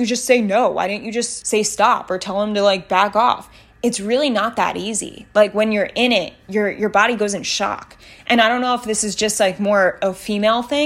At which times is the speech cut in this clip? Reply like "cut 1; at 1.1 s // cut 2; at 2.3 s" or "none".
cut 1; at 1.3 s